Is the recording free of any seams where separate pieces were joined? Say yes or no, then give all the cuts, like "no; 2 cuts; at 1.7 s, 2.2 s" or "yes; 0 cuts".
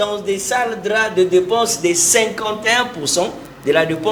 yes; 0 cuts